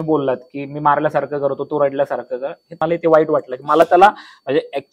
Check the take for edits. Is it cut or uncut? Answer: cut